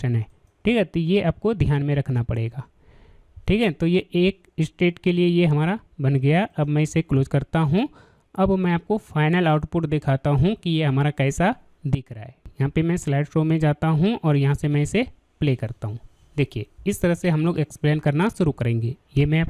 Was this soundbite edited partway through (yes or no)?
yes